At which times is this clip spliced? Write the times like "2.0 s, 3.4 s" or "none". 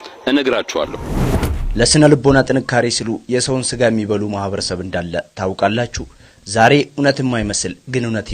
1.4 s